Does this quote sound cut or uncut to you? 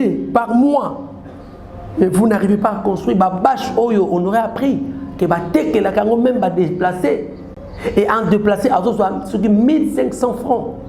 uncut